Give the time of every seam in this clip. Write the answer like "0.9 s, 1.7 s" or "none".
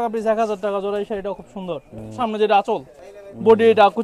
2.2 s